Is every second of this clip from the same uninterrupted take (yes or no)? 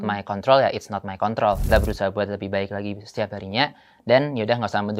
no